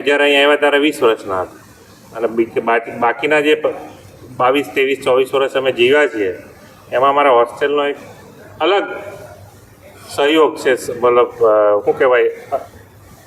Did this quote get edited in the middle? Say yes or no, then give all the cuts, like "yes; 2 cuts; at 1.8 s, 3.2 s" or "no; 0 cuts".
no; 0 cuts